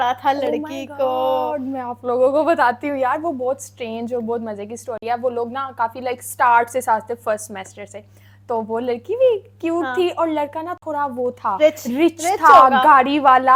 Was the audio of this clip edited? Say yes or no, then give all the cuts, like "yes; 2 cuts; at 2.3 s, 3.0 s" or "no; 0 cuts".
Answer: no; 0 cuts